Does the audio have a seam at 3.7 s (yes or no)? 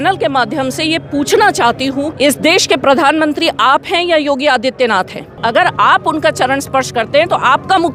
no